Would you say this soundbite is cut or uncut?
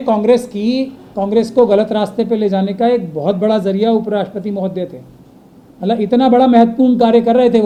uncut